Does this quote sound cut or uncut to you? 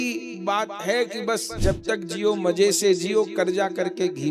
cut